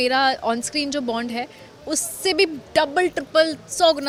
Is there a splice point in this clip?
no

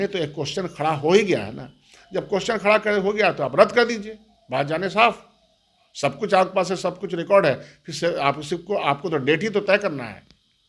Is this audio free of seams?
yes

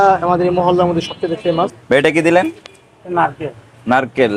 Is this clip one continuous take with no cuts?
no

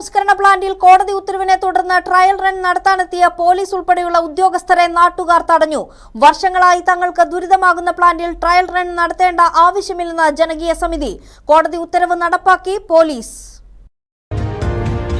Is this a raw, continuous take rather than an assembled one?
yes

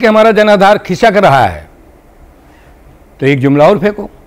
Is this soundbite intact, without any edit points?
yes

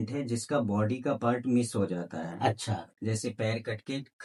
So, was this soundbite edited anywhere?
no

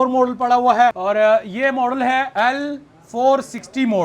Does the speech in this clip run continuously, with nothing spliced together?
no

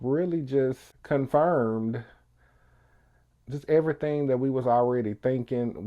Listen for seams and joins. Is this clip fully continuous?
no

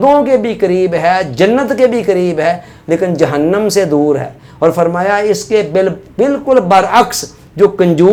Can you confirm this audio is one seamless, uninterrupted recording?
yes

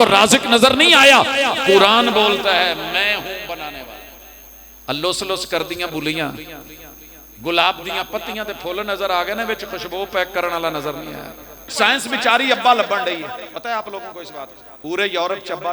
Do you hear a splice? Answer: yes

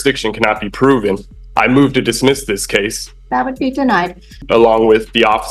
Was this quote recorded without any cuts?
no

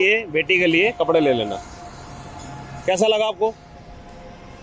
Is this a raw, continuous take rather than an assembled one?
yes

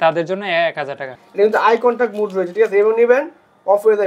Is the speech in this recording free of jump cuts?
no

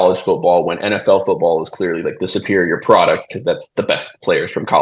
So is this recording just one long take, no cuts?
yes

